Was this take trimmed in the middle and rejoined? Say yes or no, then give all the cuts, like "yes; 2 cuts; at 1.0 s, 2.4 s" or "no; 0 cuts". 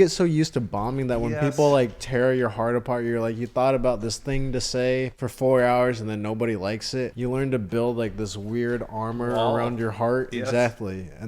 yes; 2 cuts; at 5.2 s, 7.1 s